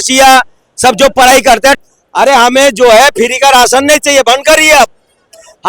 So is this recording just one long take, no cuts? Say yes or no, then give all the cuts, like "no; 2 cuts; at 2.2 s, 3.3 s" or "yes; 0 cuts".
no; 1 cut; at 1.9 s